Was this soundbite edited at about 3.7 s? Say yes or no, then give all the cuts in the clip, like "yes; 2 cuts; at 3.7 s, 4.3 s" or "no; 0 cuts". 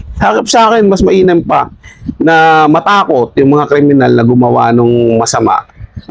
no; 0 cuts